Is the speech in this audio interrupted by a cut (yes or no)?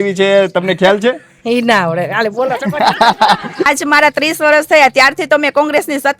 yes